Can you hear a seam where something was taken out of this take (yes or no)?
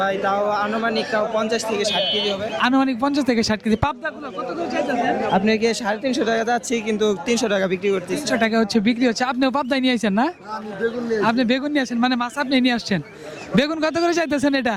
no